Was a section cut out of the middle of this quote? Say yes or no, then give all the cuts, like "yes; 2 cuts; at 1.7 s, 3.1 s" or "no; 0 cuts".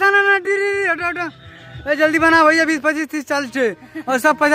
no; 0 cuts